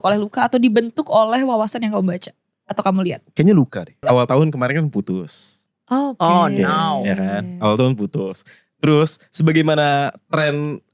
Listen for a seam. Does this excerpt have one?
yes; 1 cut; at 3.9 s

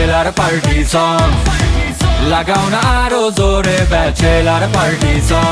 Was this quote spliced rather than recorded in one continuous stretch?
no; 0 cuts

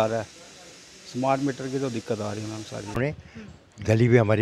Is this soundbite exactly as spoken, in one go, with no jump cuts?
no; 1 cut; at 3.0 s

